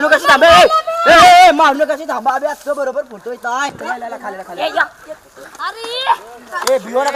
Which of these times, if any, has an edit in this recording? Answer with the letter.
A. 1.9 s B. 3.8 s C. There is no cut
B